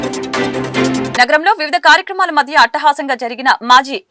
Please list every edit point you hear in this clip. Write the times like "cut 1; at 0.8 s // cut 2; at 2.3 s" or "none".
cut 1; at 1.1 s